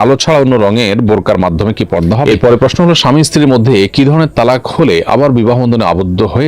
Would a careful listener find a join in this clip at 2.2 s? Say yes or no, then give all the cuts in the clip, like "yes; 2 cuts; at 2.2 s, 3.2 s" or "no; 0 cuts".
yes; 1 cut; at 2.2 s